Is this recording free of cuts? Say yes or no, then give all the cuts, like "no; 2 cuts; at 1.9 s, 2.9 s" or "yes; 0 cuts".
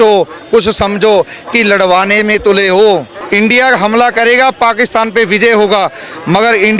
no; 1 cut; at 3.2 s